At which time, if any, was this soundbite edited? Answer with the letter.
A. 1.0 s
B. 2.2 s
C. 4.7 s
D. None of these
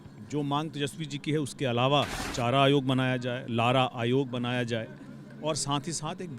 B